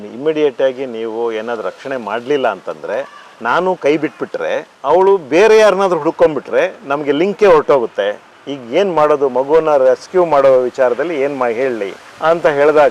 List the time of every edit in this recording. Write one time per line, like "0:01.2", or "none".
none